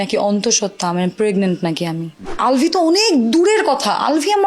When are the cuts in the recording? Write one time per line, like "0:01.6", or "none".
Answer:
0:02.2